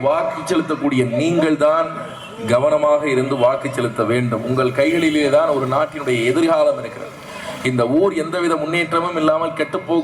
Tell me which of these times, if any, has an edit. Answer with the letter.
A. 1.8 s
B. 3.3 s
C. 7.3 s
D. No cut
D